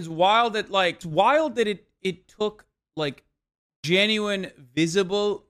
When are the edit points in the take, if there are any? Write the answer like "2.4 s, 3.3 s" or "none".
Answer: 1.0 s